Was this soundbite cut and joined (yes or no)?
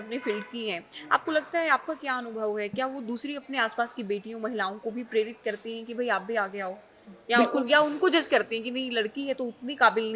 no